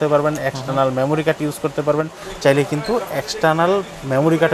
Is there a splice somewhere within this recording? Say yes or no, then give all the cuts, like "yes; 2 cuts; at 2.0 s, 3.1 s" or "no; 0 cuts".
yes; 1 cut; at 2.2 s